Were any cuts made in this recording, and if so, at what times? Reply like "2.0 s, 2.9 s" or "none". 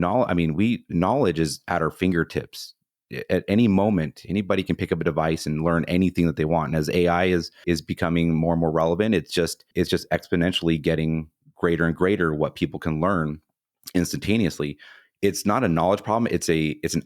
7.5 s, 9.6 s